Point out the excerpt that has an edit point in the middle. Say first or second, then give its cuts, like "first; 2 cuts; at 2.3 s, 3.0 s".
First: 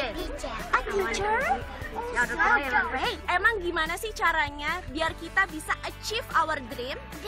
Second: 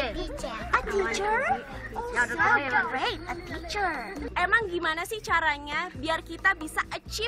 first; 1 cut; at 3.2 s